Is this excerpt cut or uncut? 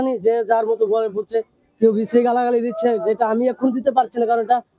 uncut